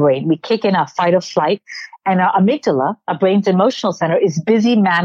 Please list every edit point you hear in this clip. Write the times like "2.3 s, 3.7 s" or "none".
none